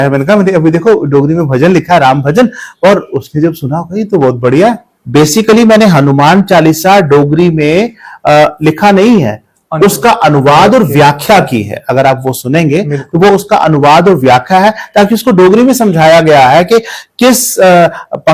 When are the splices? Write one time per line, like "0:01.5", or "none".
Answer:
0:04.9